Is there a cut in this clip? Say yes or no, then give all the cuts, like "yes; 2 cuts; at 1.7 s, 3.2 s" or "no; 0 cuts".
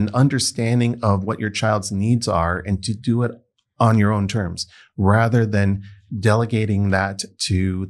no; 0 cuts